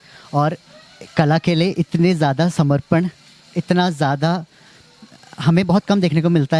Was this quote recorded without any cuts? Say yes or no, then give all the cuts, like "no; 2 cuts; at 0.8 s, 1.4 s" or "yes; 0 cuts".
yes; 0 cuts